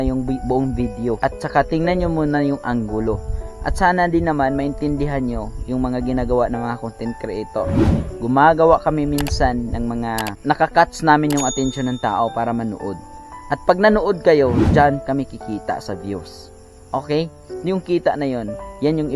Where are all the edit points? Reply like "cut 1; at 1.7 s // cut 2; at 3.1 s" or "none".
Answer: cut 1; at 1.2 s // cut 2; at 10.4 s // cut 3; at 17.5 s